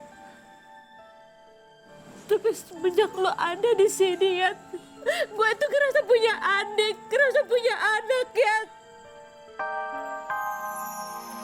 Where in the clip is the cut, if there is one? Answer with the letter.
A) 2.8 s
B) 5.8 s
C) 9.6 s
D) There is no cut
C